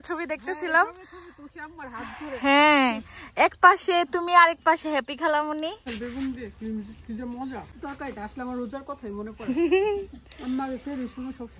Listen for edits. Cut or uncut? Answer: cut